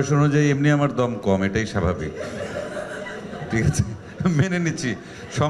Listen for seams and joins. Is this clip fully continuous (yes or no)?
yes